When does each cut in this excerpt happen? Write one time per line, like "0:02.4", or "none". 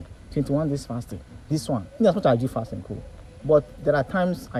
none